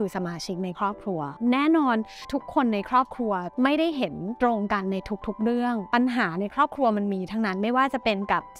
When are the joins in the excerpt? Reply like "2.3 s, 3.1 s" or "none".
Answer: 1.3 s